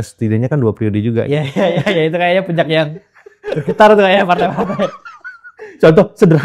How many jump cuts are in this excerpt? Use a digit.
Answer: 0